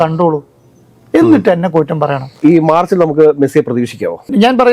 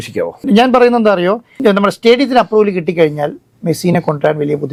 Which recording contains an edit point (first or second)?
first